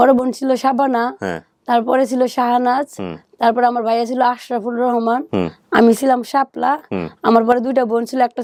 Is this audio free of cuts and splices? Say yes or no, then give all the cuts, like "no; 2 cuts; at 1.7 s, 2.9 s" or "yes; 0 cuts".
yes; 0 cuts